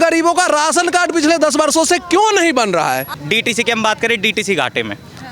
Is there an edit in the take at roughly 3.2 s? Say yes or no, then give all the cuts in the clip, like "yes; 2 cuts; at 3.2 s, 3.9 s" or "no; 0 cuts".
yes; 1 cut; at 3.2 s